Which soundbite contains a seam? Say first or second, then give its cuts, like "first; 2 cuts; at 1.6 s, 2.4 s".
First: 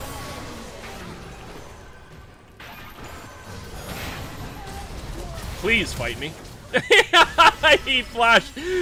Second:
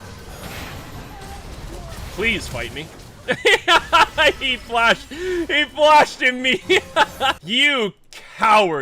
second; 1 cut; at 7.4 s